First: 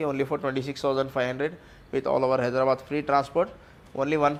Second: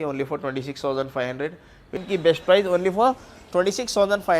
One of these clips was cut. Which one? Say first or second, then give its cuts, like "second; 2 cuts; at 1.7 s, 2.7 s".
second; 1 cut; at 2.0 s